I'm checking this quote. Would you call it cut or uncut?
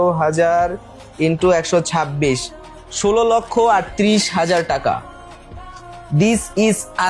uncut